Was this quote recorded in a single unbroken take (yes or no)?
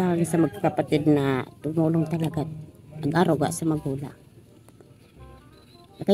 yes